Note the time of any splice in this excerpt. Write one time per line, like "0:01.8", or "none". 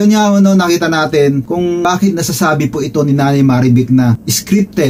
0:01.8